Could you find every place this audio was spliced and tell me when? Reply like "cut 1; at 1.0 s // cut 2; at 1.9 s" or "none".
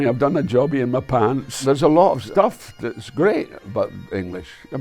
cut 1; at 1.5 s // cut 2; at 2.2 s